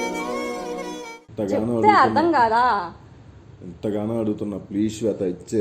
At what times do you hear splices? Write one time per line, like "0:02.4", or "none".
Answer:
0:01.2